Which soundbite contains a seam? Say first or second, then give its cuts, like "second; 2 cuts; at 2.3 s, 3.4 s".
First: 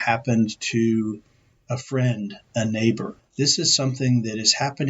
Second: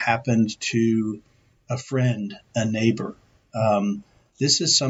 first; 1 cut; at 3.2 s